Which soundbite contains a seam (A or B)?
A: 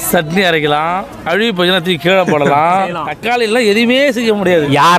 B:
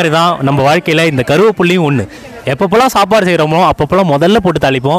A